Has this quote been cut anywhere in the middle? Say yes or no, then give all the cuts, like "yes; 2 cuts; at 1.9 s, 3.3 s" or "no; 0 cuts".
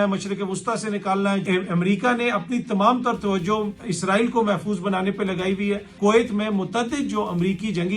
yes; 2 cuts; at 1.4 s, 5.9 s